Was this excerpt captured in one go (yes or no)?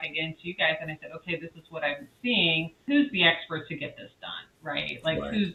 yes